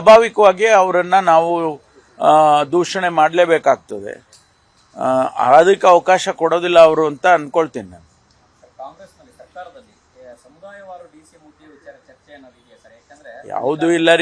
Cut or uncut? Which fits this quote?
cut